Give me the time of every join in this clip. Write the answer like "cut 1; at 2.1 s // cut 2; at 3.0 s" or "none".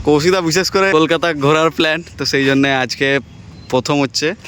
cut 1; at 0.9 s